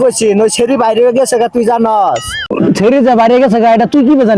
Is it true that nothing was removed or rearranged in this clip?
no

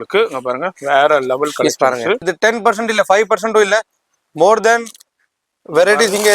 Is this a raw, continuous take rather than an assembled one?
no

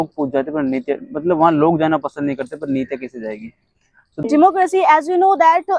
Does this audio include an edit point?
yes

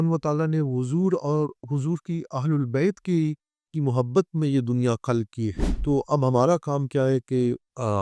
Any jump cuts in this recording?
no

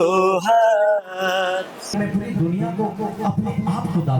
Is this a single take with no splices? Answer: no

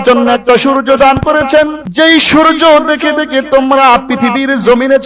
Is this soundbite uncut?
no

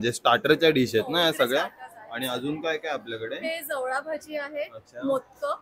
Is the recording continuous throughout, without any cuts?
yes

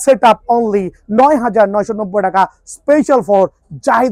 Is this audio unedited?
yes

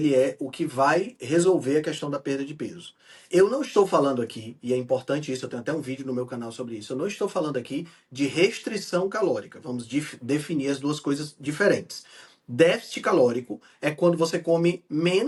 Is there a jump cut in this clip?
no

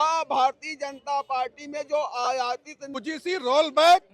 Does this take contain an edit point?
yes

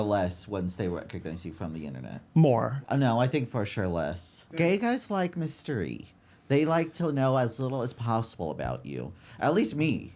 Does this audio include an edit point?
yes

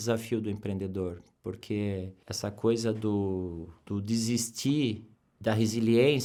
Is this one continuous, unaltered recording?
yes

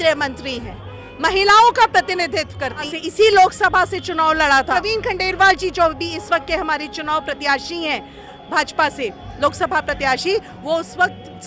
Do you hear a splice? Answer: yes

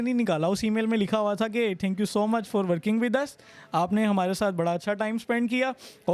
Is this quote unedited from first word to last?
yes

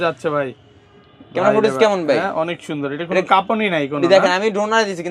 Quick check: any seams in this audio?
no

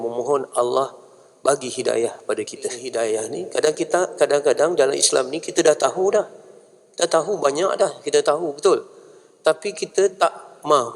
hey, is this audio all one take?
no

